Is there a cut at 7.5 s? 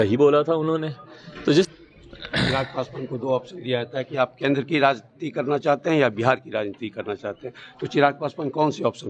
no; 1 cut; at 1.7 s

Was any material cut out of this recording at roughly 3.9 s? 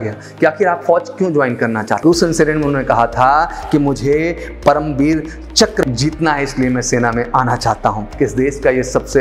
no; 3 cuts; at 1.9 s, 5.8 s, 8.1 s

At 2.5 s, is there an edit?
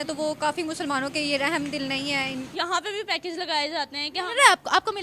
yes; 1 cut; at 2.5 s

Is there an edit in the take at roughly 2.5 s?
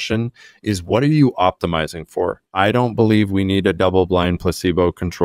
yes; 1 cut; at 2.5 s

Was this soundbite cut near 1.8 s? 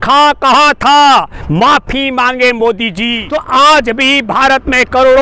no; 1 cut; at 3.2 s

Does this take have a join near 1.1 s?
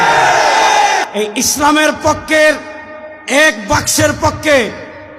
yes; 1 cut; at 1.1 s

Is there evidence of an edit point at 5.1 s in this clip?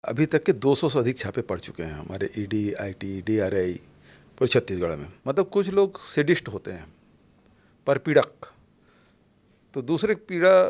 yes; 1 cut; at 5.1 s

